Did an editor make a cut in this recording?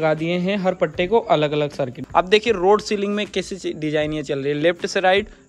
yes; 1 cut; at 2.0 s

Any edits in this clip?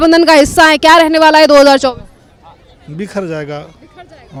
no; 0 cuts

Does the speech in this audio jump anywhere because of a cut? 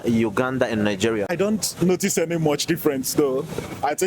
yes; 1 cut; at 1.3 s

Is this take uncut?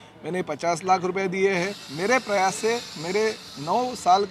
no; 1 cut; at 1.8 s

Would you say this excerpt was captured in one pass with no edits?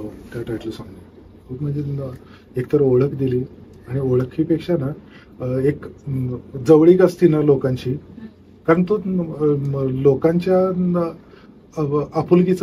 yes; 0 cuts

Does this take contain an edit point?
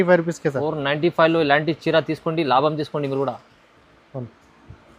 no; 0 cuts

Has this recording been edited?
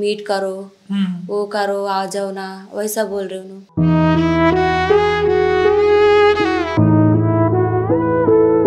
no; 0 cuts

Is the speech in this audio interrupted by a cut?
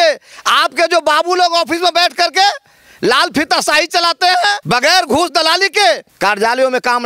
yes; 2 cuts; at 4.6 s, 6.1 s

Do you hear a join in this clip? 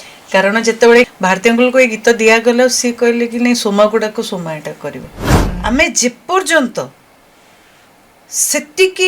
yes; 2 cuts; at 1.1 s, 5.2 s

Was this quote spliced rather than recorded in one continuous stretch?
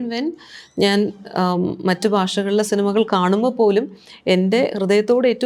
no; 0 cuts

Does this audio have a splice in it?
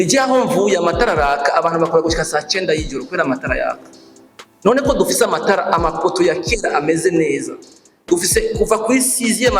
no; 0 cuts

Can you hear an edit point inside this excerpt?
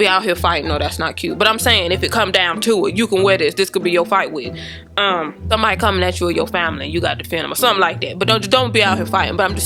no; 0 cuts

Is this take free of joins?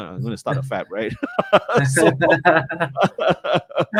yes; 0 cuts

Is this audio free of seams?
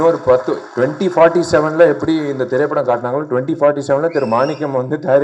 yes; 0 cuts

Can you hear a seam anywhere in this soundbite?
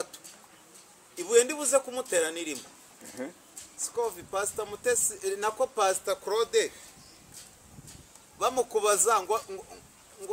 no; 0 cuts

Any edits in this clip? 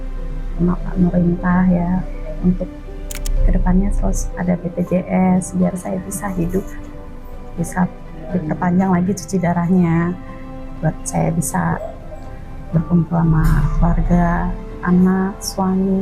no; 0 cuts

